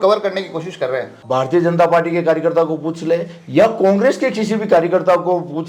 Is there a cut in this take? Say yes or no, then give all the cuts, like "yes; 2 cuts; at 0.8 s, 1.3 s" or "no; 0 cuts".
yes; 1 cut; at 1.2 s